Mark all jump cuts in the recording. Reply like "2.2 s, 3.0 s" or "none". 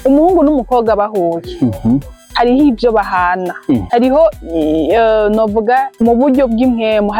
2.2 s, 3.8 s, 5.9 s